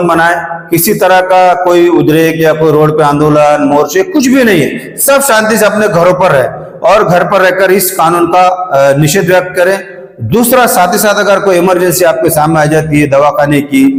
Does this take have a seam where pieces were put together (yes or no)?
no